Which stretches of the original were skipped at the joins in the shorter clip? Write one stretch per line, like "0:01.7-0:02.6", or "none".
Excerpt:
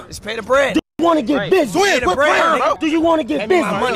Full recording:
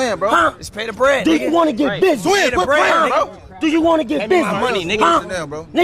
0:03.3-0:03.6